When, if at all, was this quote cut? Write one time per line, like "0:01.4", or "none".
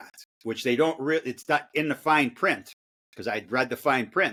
none